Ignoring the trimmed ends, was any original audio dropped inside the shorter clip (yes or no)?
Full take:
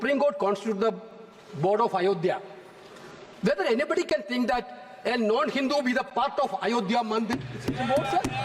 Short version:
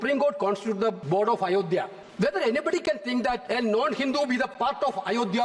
yes